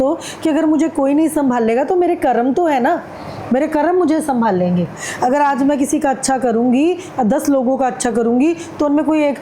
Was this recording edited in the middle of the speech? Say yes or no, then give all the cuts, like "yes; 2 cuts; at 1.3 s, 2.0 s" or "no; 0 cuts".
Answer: no; 0 cuts